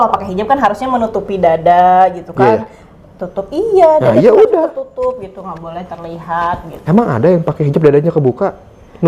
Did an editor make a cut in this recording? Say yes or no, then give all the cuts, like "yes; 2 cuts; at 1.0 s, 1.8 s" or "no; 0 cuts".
no; 0 cuts